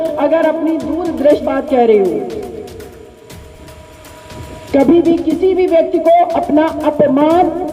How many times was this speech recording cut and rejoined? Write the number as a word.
one